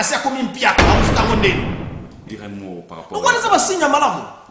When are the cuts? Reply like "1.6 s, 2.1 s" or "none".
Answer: 2.2 s